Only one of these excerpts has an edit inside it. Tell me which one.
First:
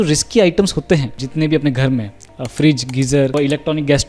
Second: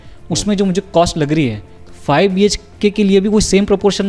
first; 2 cuts; at 1.2 s, 3.3 s

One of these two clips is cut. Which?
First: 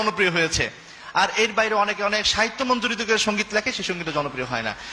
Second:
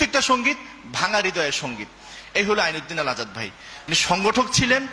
second; 1 cut; at 3.9 s

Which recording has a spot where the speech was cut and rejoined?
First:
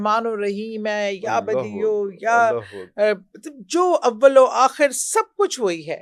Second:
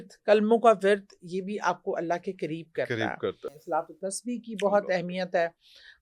second; 1 cut; at 3.5 s

